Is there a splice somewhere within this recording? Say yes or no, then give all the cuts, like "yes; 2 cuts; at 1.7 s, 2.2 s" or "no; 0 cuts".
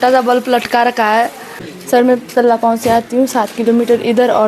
yes; 1 cut; at 1.7 s